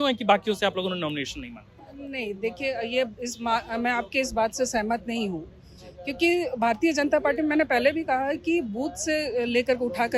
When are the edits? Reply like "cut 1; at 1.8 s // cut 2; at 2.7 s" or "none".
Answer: none